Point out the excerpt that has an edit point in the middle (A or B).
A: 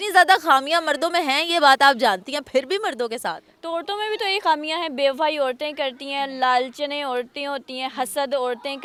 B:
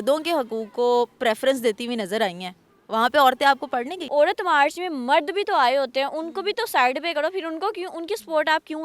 B